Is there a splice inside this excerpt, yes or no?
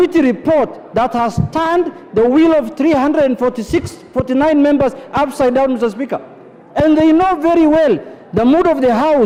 no